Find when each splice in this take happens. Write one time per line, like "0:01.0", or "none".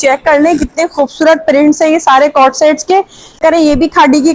0:03.4